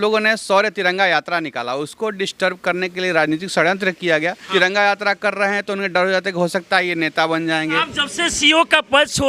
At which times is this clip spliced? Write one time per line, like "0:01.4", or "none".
0:04.4
0:07.9